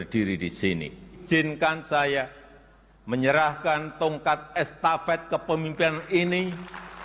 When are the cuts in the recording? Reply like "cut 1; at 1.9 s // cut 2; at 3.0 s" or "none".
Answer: cut 1; at 1.2 s